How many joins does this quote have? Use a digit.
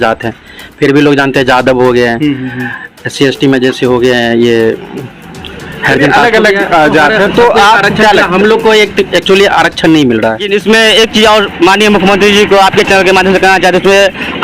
1